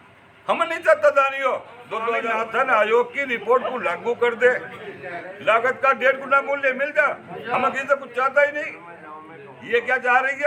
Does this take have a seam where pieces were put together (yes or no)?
no